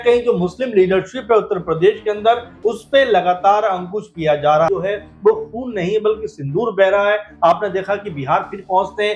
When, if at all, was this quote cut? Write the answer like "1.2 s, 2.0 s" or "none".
4.7 s